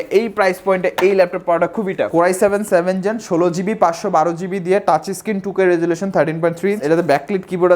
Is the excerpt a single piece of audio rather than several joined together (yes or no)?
no